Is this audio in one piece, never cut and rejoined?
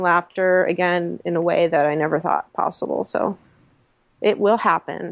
yes; 0 cuts

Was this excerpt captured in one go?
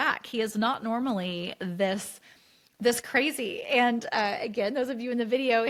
yes; 0 cuts

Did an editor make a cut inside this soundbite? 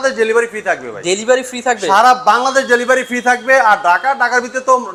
no; 0 cuts

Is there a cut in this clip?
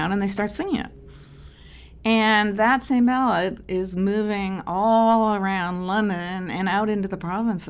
no; 0 cuts

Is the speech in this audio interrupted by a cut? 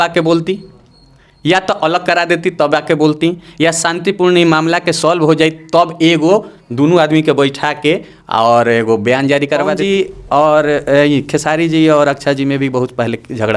yes; 1 cut; at 9.8 s

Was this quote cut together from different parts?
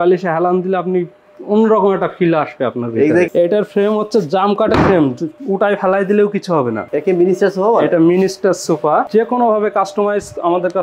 yes; 3 cuts; at 3.3 s, 6.8 s, 9.1 s

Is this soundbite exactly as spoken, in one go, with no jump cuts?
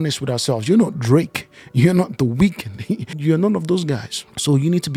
yes; 0 cuts

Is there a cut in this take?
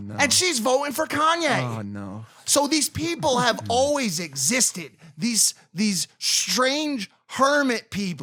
no; 0 cuts

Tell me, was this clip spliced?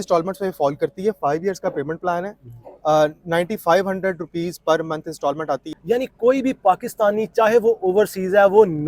yes; 1 cut; at 5.7 s

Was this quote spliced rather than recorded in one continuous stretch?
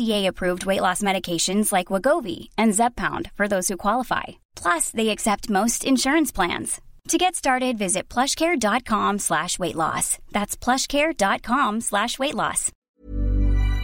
yes; 1 cut; at 12.7 s

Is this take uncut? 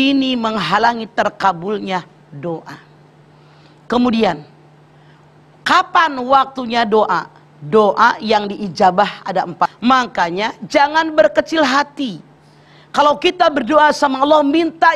no; 1 cut; at 9.7 s

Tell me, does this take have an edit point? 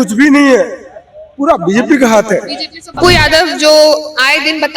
yes; 1 cut; at 2.9 s

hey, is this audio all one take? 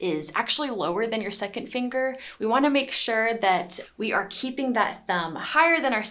yes; 0 cuts

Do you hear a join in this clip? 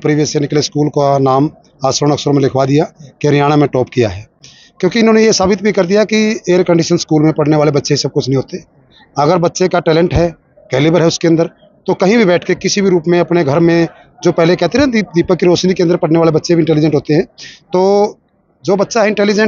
no; 0 cuts

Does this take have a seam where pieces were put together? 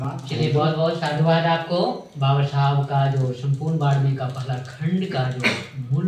no; 0 cuts

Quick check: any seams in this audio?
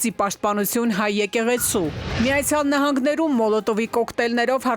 yes; 1 cut; at 2.1 s

